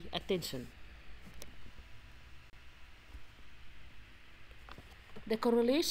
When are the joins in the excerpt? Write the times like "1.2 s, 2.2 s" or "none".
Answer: 2.5 s